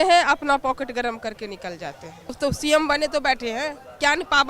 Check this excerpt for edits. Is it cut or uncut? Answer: cut